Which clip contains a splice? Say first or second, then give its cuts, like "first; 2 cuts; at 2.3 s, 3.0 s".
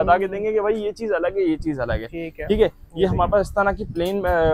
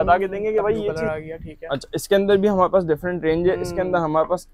second; 1 cut; at 0.9 s